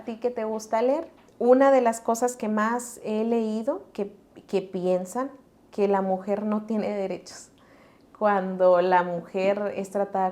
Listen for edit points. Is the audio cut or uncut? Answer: cut